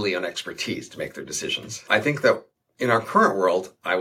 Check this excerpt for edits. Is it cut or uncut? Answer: cut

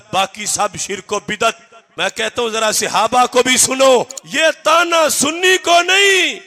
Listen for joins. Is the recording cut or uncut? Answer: cut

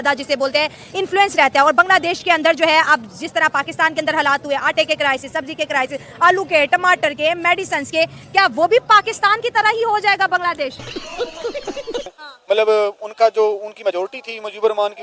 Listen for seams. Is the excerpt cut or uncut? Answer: cut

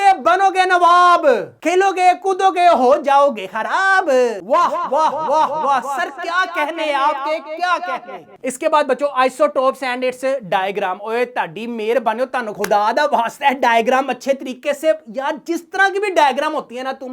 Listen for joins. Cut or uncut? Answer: uncut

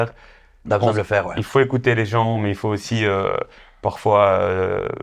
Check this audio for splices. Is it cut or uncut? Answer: uncut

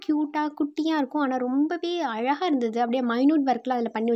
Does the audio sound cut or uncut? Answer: uncut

